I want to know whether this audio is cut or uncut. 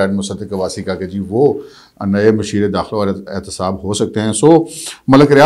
uncut